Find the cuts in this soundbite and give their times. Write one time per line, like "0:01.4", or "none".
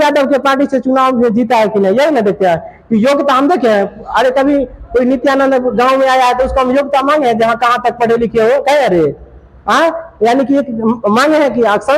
none

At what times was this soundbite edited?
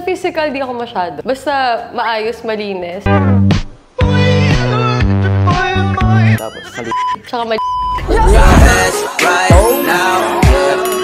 none

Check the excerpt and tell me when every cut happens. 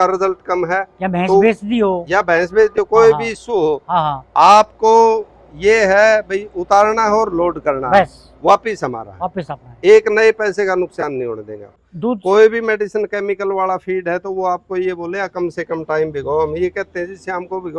0:11.7

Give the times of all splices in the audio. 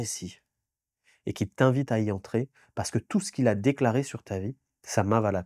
none

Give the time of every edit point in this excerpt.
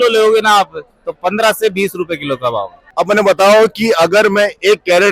0:02.8

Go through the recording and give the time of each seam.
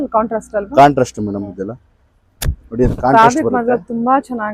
none

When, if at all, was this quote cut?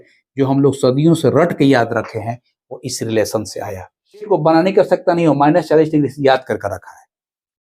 0:04.3

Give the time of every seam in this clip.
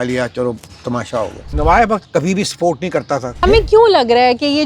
0:01.4
0:03.4

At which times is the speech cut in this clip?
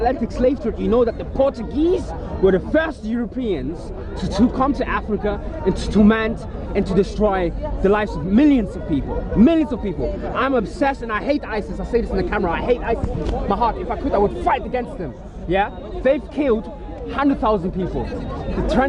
none

